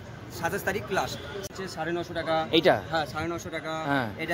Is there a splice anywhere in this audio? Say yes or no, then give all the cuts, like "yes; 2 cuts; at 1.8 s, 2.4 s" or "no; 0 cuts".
yes; 1 cut; at 1.5 s